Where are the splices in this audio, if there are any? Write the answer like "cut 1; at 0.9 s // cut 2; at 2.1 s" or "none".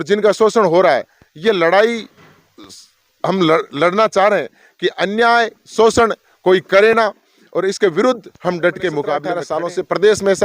cut 1; at 9.3 s